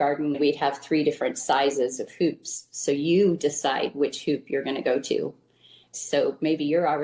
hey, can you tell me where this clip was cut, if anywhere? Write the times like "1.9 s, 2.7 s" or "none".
none